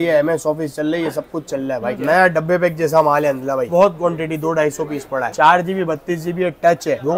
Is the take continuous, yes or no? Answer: no